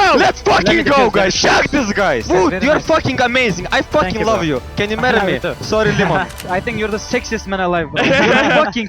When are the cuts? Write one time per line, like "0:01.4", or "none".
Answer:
0:02.2
0:06.4